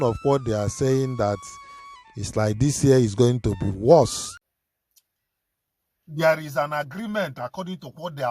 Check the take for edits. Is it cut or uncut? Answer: cut